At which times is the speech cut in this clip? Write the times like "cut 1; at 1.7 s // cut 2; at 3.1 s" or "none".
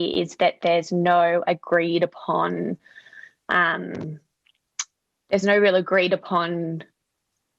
none